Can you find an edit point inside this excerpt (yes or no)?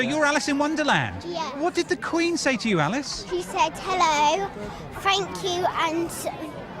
yes